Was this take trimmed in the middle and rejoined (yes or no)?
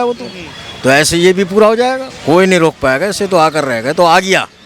yes